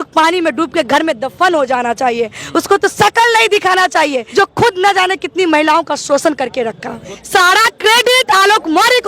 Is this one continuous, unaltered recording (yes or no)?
no